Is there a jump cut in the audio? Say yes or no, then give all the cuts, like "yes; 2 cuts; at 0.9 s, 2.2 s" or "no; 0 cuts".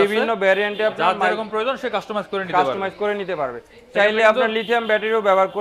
no; 0 cuts